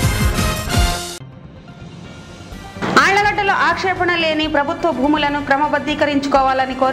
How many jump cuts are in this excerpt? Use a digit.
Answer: 1